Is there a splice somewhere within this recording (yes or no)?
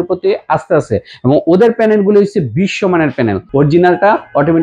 yes